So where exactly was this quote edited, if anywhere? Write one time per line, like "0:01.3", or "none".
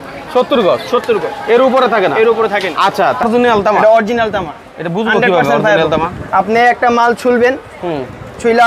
0:03.2